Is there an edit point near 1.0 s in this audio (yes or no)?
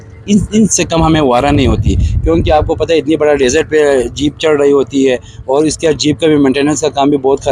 no